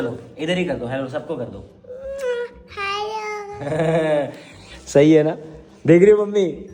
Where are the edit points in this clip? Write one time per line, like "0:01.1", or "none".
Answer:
none